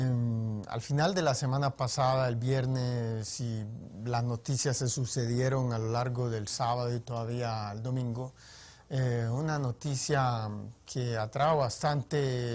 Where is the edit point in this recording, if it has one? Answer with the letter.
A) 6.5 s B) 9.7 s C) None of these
C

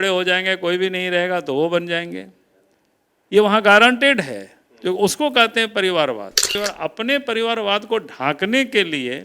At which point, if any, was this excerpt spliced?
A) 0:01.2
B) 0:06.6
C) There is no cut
B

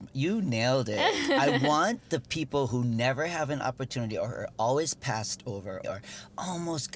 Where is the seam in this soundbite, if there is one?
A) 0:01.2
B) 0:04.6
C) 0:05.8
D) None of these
C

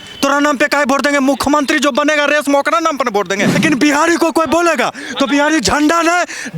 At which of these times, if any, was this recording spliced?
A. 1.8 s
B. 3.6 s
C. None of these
B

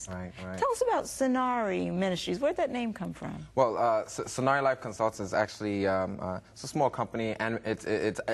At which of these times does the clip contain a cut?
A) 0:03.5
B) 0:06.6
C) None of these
A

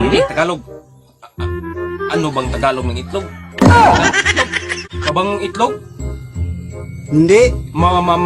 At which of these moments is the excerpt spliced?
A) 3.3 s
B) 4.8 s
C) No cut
B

